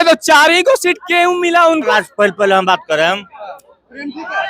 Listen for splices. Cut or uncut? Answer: cut